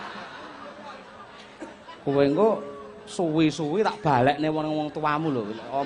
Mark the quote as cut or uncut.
uncut